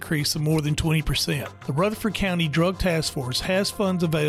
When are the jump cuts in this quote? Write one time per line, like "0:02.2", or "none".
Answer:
0:01.5